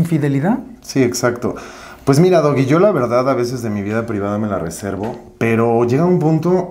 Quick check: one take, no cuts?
yes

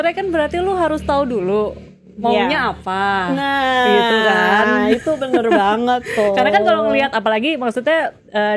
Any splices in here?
no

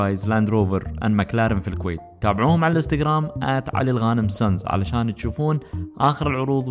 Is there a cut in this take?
no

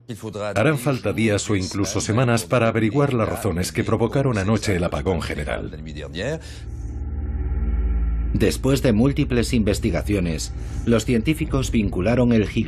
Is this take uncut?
yes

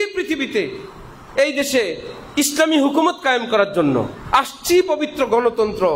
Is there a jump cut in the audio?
no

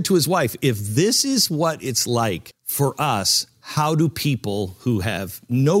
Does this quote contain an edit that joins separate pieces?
yes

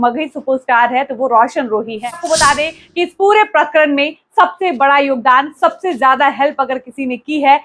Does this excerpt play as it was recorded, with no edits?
no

